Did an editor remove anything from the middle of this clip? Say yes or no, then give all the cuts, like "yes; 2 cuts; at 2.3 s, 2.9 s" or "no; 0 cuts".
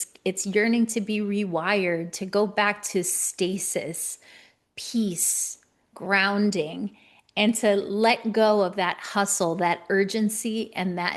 no; 0 cuts